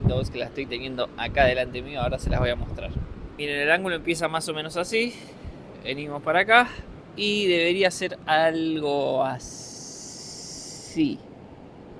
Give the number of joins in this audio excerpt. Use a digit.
0